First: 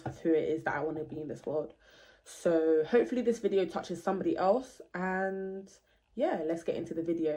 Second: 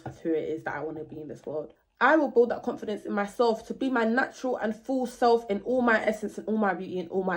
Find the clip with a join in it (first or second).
second